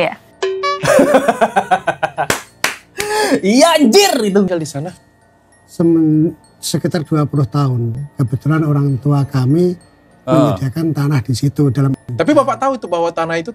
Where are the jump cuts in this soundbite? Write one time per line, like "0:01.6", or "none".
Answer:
0:04.5
0:12.0